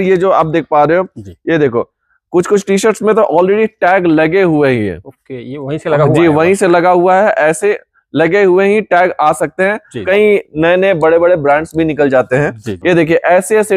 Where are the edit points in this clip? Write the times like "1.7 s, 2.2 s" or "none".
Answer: 10.0 s, 12.7 s